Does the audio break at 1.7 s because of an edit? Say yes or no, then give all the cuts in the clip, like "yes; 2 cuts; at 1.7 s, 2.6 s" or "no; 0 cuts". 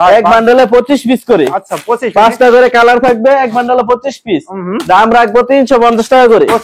no; 0 cuts